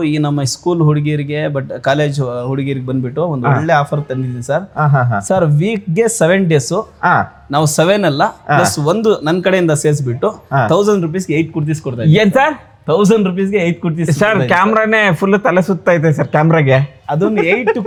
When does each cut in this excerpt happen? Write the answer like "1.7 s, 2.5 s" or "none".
none